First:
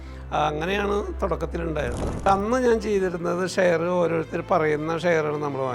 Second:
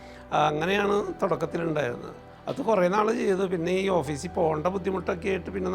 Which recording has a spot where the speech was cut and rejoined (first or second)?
first